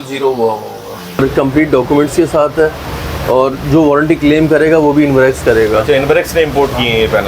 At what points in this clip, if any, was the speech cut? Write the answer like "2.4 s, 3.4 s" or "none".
1.2 s